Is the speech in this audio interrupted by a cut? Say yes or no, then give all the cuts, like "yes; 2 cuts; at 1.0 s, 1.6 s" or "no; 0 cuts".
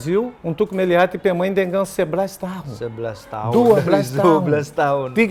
no; 0 cuts